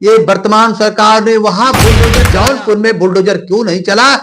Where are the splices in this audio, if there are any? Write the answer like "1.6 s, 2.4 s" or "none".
2.1 s